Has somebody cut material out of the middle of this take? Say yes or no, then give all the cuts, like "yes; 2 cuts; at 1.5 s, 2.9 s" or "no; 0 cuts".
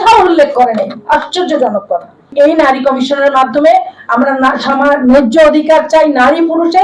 yes; 1 cut; at 2.3 s